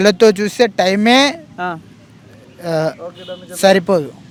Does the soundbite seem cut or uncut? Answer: uncut